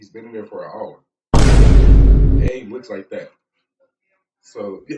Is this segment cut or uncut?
cut